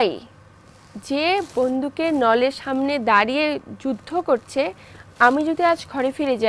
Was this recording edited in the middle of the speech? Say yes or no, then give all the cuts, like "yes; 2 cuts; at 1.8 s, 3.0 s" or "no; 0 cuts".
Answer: no; 0 cuts